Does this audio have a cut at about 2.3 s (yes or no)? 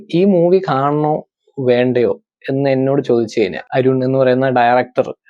no